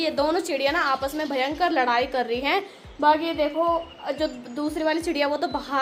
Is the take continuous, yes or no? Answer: yes